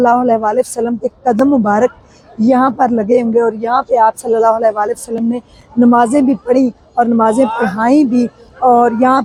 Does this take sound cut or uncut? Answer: uncut